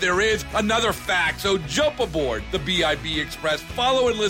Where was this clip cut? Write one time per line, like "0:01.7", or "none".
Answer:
none

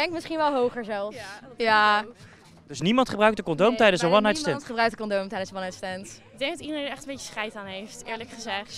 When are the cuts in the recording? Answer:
0:06.3

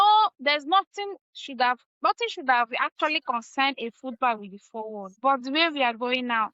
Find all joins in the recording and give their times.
0:05.1

